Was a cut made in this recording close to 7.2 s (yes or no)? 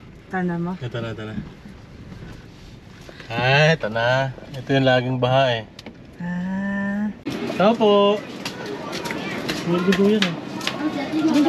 yes